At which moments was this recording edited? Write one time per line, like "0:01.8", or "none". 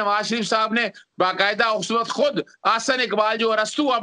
none